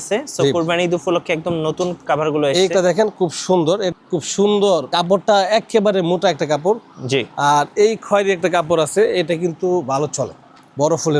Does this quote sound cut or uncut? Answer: cut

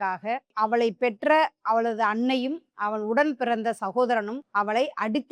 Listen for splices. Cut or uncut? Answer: cut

